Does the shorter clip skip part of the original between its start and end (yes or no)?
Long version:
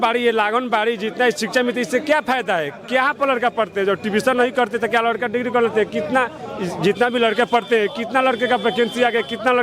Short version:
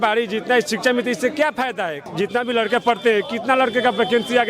yes